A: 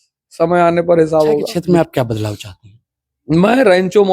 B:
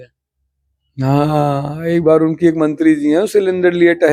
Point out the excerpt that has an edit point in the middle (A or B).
A